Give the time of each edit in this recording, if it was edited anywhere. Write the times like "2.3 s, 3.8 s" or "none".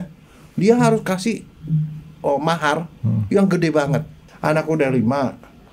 4.3 s